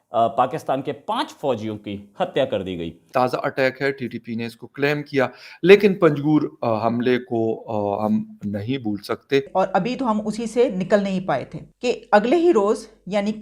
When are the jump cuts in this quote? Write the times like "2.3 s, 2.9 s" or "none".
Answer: 3.0 s, 9.5 s